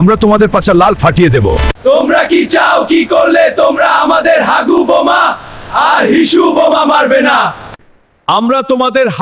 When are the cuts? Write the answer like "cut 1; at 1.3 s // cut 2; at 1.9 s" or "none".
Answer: cut 1; at 1.7 s